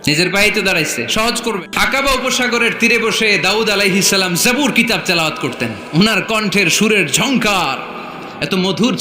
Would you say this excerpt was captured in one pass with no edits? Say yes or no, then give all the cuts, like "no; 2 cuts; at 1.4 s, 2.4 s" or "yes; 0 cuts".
no; 1 cut; at 1.6 s